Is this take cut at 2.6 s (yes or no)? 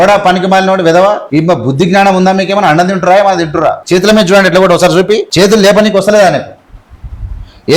no